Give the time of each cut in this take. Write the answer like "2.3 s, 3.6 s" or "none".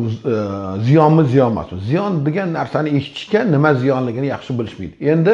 none

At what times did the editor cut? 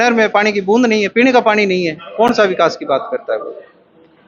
none

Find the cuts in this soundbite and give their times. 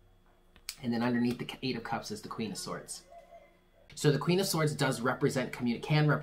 3.9 s

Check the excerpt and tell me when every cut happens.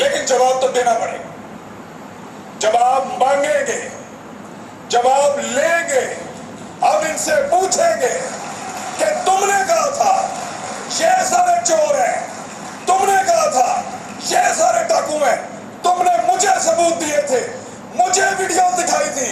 none

